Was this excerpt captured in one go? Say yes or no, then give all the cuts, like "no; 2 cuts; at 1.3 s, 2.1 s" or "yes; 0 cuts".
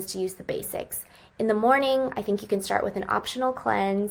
yes; 0 cuts